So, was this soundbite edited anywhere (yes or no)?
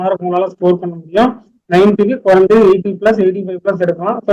no